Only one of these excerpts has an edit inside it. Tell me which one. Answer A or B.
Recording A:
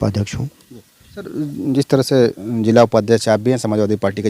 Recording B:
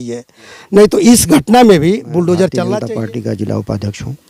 B